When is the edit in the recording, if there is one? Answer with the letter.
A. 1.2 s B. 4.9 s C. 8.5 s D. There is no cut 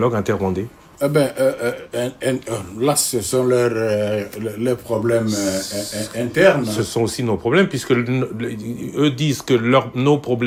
D